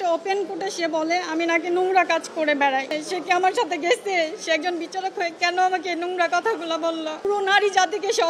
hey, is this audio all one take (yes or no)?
no